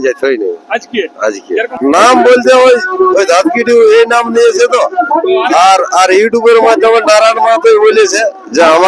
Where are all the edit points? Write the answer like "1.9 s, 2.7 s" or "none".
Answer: 1.7 s